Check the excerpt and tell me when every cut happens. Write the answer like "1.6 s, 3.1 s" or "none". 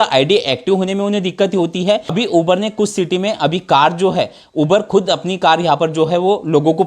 2.1 s